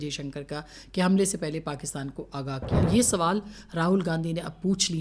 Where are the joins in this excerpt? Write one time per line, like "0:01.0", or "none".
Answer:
0:02.8

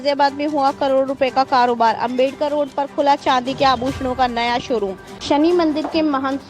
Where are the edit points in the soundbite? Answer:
0:05.1

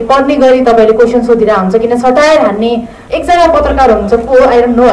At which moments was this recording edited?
0:03.0

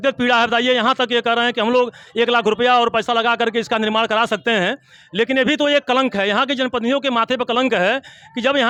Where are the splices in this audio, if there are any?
none

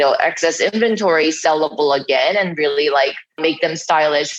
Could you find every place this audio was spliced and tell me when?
0:03.4

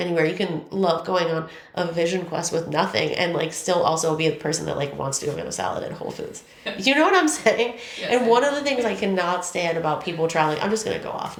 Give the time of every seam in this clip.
none

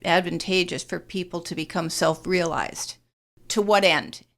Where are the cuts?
0:03.4

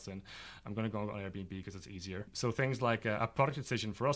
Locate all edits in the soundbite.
0:02.3

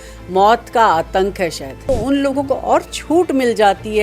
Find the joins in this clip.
0:01.7

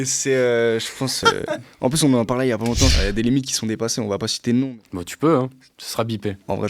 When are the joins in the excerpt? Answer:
0:03.0

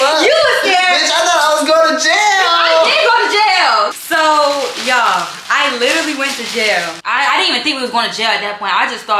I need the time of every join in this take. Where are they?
0:04.0
0:07.0

